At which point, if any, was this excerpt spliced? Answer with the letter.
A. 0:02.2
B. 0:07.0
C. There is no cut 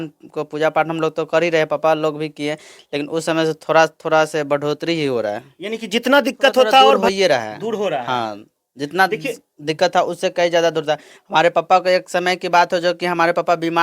B